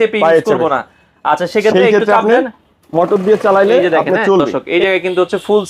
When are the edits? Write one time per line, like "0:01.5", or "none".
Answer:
0:04.6

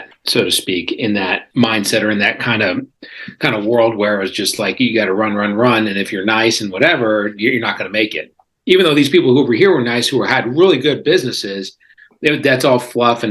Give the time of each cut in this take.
none

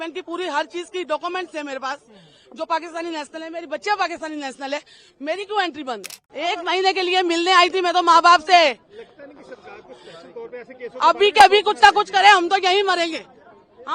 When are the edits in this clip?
0:06.2

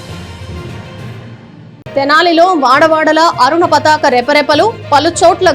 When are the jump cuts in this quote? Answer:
0:01.7

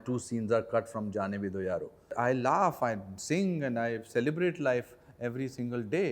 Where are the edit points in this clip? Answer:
0:02.1

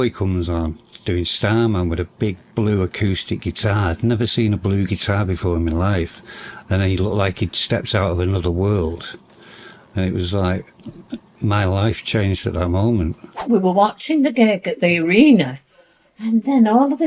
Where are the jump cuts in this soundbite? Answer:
0:13.4

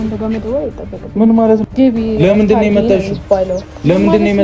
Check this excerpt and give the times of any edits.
0:01.6

